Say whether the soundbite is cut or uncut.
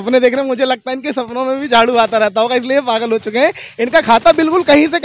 uncut